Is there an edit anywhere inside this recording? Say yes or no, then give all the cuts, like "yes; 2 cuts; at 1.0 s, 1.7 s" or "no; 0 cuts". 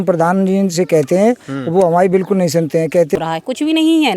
yes; 1 cut; at 3.2 s